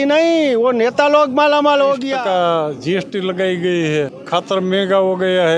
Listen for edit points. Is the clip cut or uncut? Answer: cut